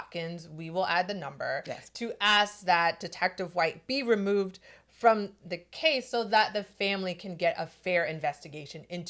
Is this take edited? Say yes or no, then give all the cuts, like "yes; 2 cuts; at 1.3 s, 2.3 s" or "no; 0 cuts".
no; 0 cuts